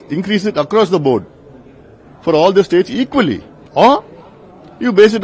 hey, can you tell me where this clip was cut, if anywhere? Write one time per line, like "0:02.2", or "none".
0:03.7